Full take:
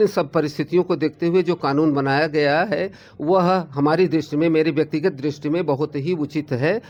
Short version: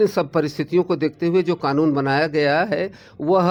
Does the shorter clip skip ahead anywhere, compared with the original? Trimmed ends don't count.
no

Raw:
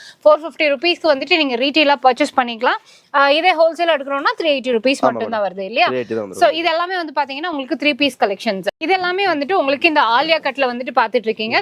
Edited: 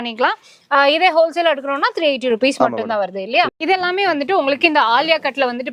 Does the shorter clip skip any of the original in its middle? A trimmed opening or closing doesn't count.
yes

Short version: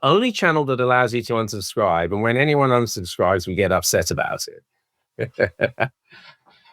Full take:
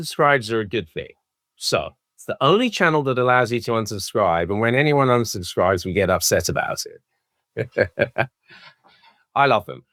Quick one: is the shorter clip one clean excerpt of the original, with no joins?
yes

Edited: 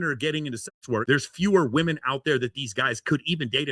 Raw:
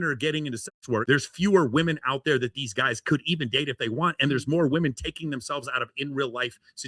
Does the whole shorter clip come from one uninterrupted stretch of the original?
yes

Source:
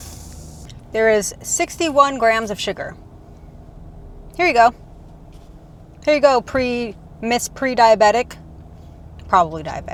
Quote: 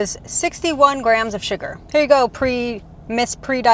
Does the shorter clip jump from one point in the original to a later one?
yes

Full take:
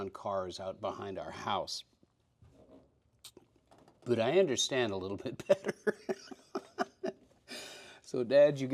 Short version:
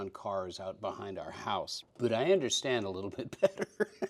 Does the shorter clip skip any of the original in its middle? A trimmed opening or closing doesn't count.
yes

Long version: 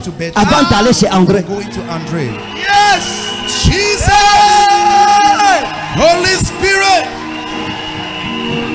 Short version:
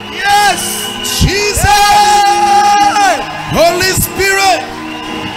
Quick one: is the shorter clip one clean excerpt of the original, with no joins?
yes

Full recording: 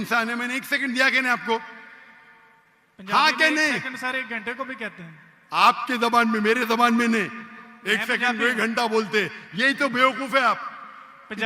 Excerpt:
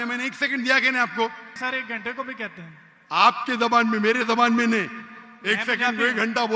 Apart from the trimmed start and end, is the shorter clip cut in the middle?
yes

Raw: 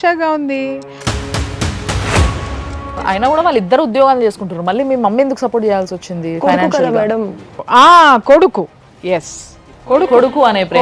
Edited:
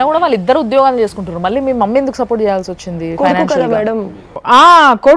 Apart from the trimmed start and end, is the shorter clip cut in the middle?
no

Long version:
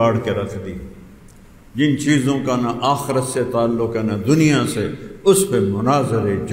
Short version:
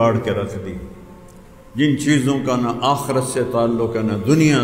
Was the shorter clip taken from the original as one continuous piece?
yes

